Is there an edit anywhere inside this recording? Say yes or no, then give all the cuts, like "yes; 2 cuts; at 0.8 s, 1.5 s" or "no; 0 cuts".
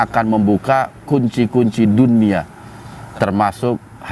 no; 0 cuts